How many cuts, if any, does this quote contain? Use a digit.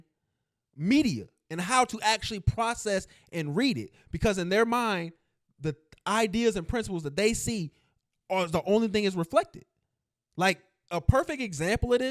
0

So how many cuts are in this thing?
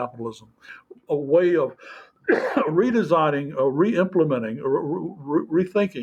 0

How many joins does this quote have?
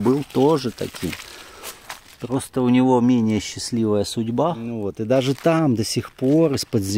1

